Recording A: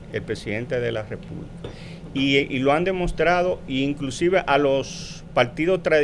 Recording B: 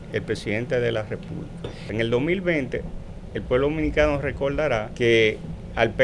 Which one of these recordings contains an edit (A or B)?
B